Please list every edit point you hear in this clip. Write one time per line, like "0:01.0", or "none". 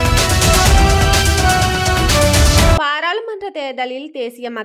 0:02.6